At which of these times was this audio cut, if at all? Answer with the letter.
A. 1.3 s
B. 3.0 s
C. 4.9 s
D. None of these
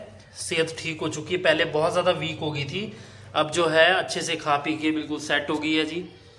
D